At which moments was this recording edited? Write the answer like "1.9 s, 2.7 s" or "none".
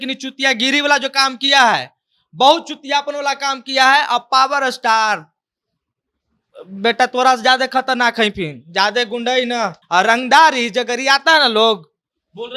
9.8 s